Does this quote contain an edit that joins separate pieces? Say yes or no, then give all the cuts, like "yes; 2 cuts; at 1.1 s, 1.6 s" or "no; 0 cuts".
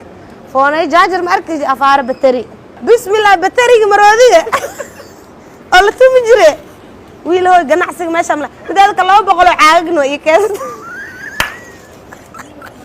yes; 1 cut; at 2.7 s